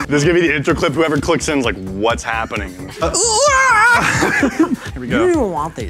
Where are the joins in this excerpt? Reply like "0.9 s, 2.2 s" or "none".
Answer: 4.8 s